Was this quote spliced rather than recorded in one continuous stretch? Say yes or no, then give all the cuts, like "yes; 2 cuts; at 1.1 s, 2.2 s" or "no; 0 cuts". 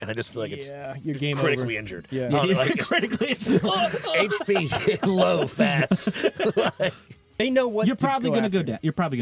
yes; 1 cut; at 7.3 s